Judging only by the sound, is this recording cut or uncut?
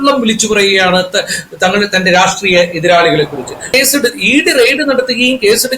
cut